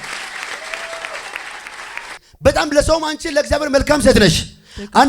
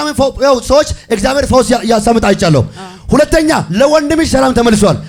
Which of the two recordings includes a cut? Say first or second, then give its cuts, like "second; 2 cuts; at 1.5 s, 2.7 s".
first; 1 cut; at 2.2 s